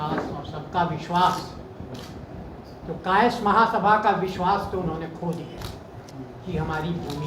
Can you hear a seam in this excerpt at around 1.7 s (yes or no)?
no